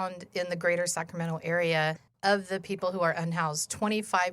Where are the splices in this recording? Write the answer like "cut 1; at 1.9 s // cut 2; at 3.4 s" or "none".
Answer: cut 1; at 2.1 s

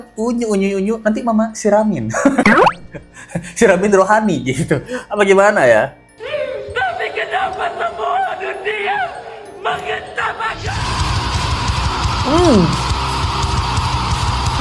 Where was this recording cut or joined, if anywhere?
none

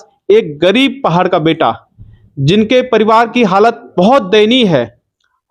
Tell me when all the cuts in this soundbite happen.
none

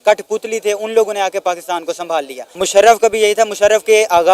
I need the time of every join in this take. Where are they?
cut 1; at 2.4 s

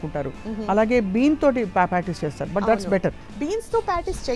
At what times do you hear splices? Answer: cut 1; at 3.3 s

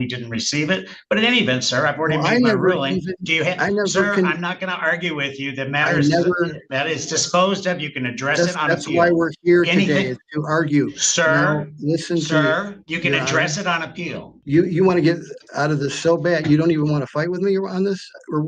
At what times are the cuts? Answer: cut 1; at 14.3 s

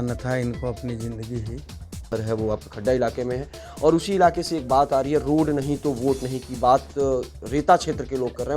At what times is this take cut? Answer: cut 1; at 2.0 s

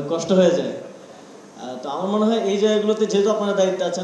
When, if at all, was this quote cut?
none

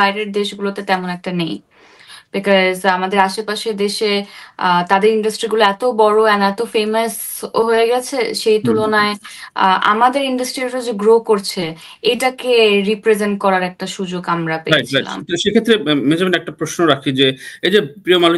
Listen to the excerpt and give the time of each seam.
none

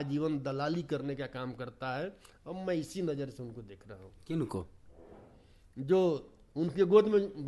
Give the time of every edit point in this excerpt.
none

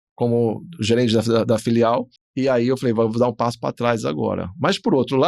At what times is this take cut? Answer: none

